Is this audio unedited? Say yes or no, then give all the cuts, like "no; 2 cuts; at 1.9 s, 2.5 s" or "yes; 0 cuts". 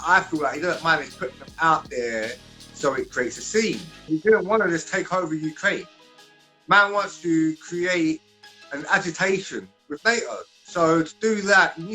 no; 1 cut; at 4.0 s